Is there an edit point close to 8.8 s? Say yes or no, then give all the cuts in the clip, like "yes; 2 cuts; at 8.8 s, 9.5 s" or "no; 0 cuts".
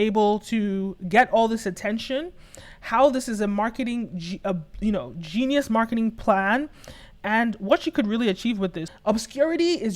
yes; 1 cut; at 8.8 s